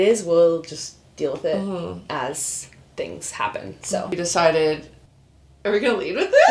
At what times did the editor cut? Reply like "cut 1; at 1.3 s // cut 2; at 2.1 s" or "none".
cut 1; at 4.1 s